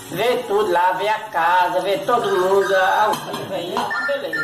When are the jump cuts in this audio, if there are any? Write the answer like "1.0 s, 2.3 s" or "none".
3.0 s